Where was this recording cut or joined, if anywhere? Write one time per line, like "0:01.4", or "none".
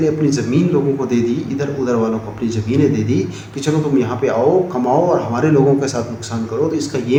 none